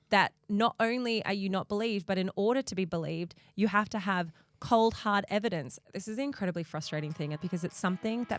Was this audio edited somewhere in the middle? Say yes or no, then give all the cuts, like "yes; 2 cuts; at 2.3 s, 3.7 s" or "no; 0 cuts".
yes; 2 cuts; at 5.9 s, 7.4 s